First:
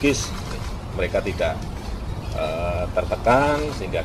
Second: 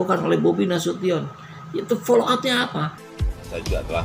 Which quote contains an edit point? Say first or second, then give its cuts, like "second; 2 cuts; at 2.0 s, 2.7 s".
second; 1 cut; at 3.0 s